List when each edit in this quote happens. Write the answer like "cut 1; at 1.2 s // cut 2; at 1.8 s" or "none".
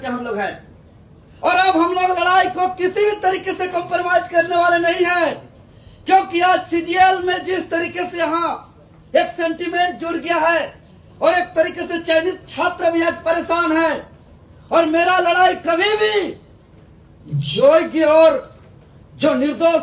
none